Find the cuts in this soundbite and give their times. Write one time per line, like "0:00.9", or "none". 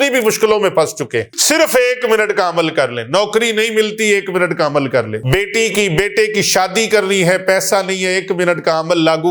0:01.3
0:05.2